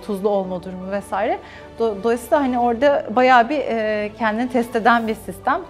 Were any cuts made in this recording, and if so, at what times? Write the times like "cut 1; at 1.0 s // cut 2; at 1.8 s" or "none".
none